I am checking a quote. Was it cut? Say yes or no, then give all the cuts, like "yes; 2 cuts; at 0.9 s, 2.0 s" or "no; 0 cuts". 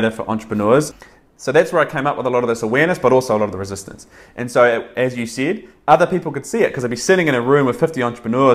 yes; 1 cut; at 0.9 s